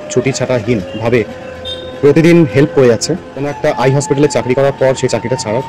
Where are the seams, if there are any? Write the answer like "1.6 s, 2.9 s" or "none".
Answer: 3.5 s